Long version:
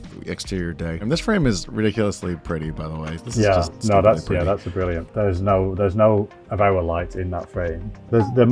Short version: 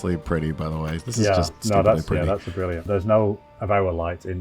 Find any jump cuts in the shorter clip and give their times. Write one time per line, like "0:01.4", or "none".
0:02.8

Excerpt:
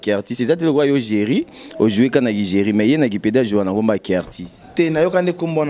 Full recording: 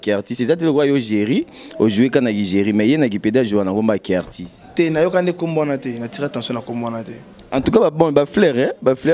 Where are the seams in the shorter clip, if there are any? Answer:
none

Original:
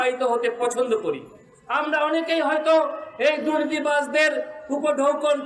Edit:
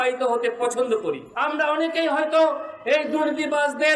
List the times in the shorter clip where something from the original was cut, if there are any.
0:01.3

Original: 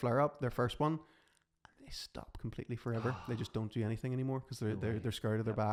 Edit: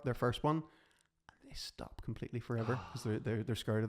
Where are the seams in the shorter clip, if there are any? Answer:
0:02.9

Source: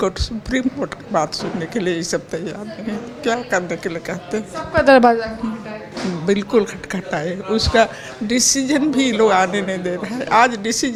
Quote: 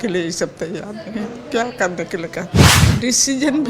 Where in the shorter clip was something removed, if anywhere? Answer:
0:02.8

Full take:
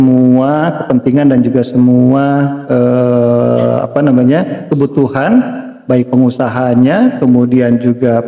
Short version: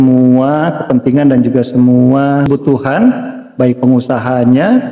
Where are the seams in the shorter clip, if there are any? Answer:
0:02.5

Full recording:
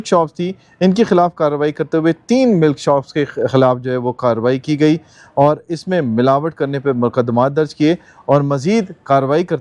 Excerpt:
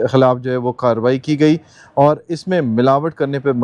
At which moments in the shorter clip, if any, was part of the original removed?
none

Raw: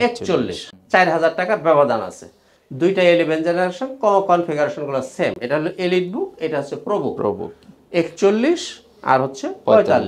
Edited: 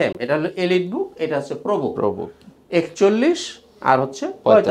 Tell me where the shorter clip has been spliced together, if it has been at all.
none

